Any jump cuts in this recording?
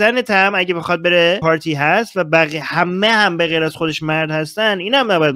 yes; 1 cut; at 1.4 s

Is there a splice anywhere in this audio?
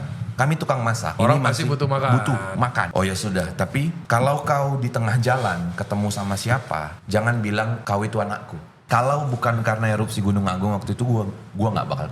yes; 6 cuts; at 1.1 s, 2.9 s, 4.0 s, 7.0 s, 7.8 s, 8.7 s

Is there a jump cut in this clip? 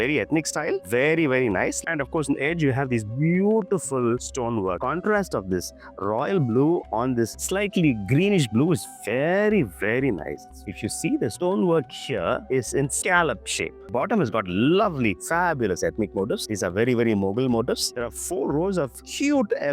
yes; 5 cuts; at 1.8 s, 4.8 s, 10.7 s, 13.9 s, 17.9 s

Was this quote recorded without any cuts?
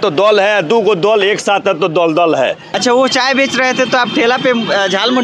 no; 1 cut; at 2.7 s

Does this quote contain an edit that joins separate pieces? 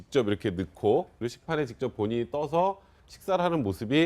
yes; 1 cut; at 1.5 s

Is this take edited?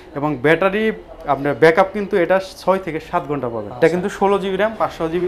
yes; 1 cut; at 3.6 s

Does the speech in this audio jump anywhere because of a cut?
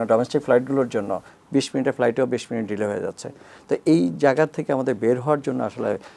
no; 0 cuts

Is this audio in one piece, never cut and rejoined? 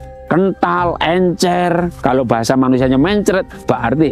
yes; 0 cuts

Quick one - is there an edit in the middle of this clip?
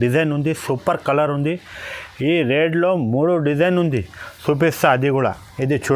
no; 0 cuts

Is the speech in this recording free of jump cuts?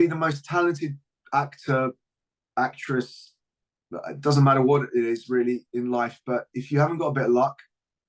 yes; 0 cuts

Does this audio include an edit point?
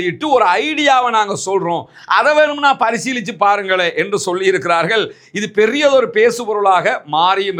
no; 0 cuts

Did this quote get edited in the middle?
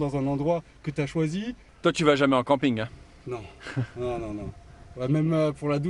no; 0 cuts

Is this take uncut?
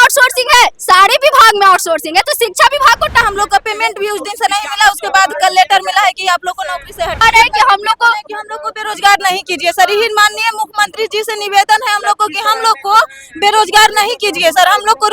no; 2 cuts; at 3.2 s, 7.2 s

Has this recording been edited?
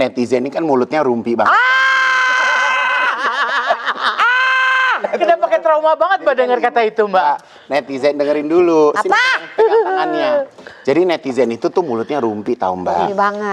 no; 0 cuts

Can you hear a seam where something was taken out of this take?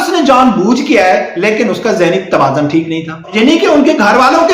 yes; 1 cut; at 3.3 s

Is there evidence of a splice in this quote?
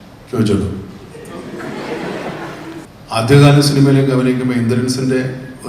yes; 1 cut; at 2.9 s

